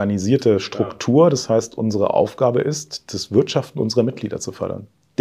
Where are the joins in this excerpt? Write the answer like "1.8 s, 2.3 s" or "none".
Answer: none